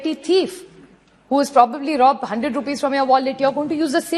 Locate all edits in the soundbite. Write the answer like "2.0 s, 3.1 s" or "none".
none

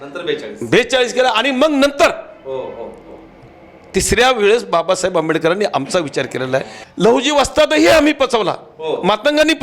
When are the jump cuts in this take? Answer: 6.8 s

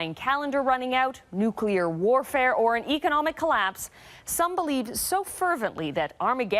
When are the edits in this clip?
4.5 s

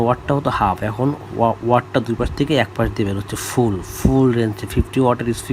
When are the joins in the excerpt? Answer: none

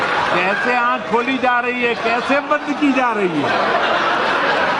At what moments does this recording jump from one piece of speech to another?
none

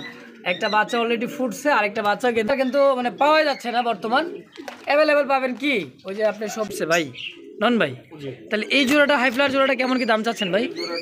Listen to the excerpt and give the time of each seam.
2.5 s, 6.7 s

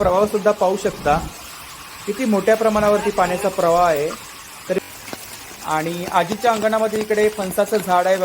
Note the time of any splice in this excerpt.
4.8 s

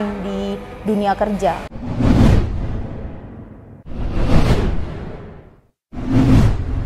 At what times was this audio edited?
1.6 s

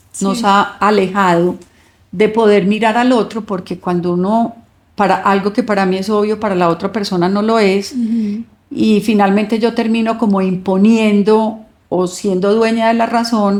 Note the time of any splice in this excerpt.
none

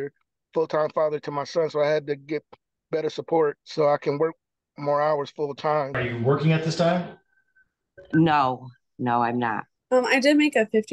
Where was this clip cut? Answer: 3.6 s, 6.0 s, 9.7 s

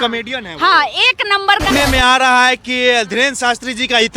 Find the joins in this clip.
1.7 s

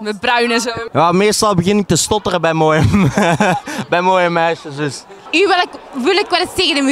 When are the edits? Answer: 0.9 s, 5.1 s

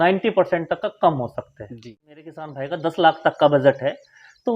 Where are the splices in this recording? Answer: 2.5 s

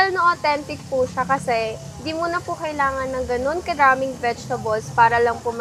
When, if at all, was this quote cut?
none

